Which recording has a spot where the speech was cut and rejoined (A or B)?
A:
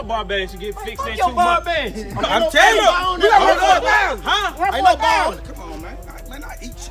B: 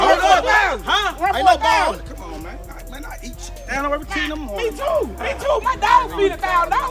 A